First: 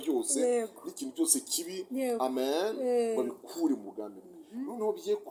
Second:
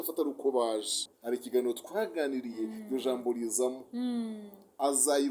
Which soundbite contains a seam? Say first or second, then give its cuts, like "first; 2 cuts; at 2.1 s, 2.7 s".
second; 1 cut; at 1.0 s